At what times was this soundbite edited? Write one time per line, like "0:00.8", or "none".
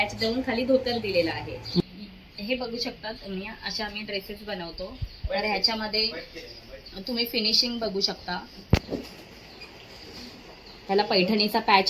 0:01.8